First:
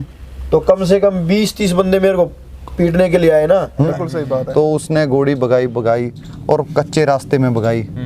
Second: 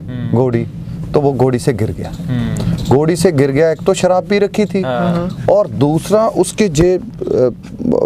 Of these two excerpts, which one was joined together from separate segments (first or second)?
first